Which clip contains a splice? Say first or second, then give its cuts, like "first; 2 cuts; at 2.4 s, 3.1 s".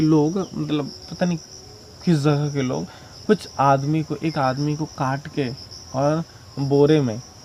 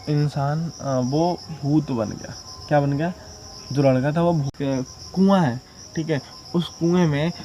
second; 1 cut; at 4.5 s